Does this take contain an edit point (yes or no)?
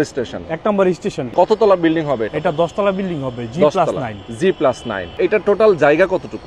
yes